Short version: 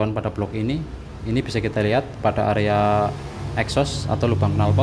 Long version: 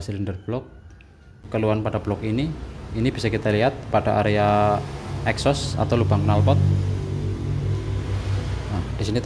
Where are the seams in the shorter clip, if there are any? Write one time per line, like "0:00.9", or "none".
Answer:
none